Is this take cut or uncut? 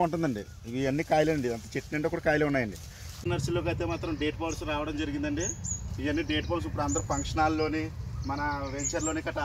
cut